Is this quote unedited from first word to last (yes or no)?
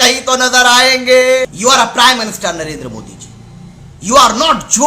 no